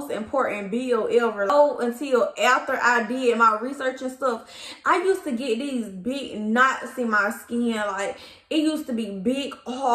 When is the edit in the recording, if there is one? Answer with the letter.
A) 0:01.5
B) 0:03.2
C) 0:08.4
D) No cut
A